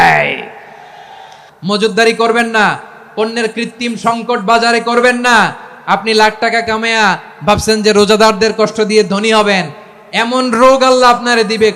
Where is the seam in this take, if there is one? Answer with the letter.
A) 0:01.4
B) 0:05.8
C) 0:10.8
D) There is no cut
A